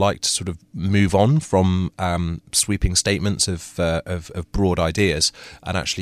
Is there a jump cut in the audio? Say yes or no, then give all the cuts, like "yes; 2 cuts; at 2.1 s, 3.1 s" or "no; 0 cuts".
no; 0 cuts